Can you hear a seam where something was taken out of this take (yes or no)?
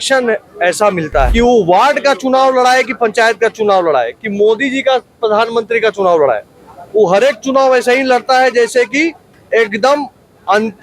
yes